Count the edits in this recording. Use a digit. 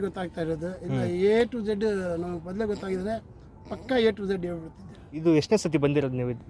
1